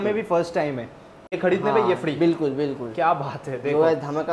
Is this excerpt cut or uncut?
cut